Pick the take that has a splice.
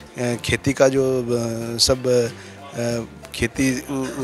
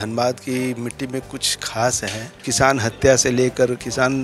second; 1 cut; at 2.5 s

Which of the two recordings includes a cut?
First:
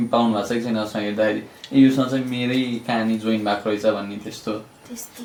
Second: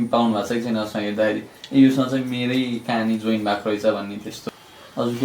second; 1 cut; at 4.4 s

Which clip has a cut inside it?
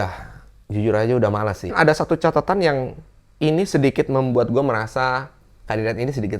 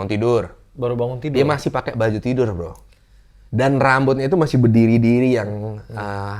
first; 1 cut; at 1.7 s

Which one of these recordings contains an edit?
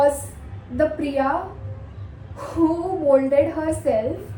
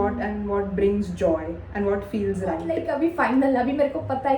second; 1 cut; at 2.8 s

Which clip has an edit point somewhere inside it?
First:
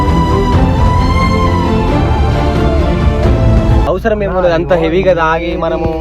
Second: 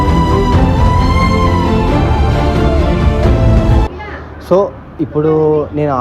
first; 1 cut; at 3.8 s

